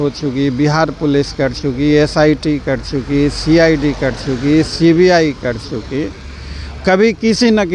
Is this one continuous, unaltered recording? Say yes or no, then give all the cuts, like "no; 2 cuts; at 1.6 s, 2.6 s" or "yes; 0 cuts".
yes; 0 cuts